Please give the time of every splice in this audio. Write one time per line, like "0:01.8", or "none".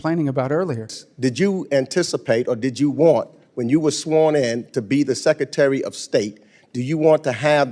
0:01.0